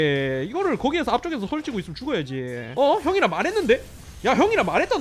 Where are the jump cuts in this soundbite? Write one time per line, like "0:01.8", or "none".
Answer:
0:02.7